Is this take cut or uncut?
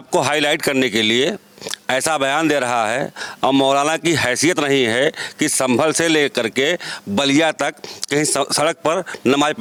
uncut